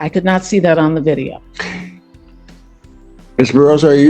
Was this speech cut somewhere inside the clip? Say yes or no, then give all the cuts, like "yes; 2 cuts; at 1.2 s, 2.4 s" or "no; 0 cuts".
no; 0 cuts